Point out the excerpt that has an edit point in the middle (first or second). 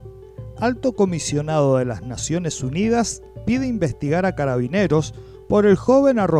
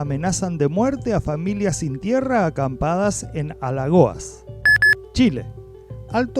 second